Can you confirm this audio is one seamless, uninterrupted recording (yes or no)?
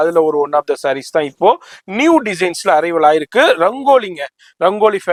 yes